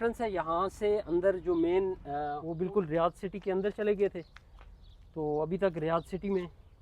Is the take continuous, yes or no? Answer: no